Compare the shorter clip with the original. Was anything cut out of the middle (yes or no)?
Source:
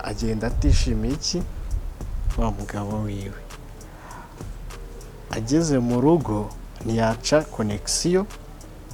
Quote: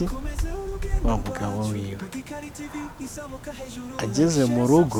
no